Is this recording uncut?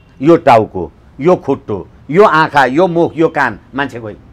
yes; 0 cuts

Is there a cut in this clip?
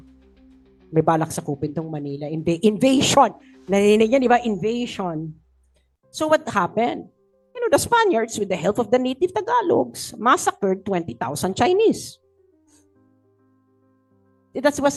no; 0 cuts

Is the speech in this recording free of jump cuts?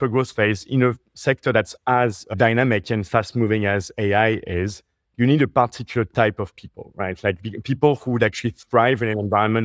no; 1 cut; at 2.3 s

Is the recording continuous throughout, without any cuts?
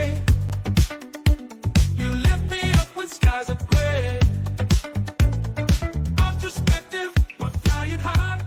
yes; 0 cuts

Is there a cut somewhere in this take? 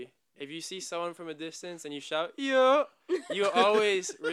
no; 0 cuts

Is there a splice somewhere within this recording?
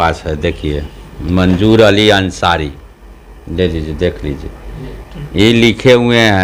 no; 0 cuts

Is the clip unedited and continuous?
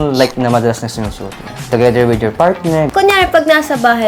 no; 2 cuts; at 1.7 s, 2.9 s

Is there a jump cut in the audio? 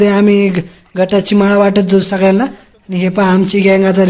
no; 0 cuts

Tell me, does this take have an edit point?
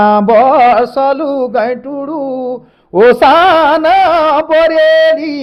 no; 0 cuts

